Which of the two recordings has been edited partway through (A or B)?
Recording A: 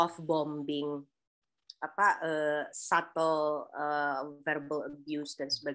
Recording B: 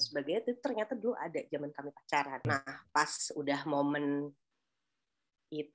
B